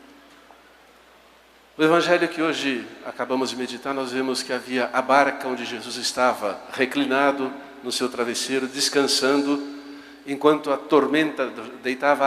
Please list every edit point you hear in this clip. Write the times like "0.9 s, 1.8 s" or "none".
5.1 s